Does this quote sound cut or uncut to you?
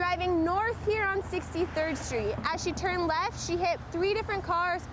uncut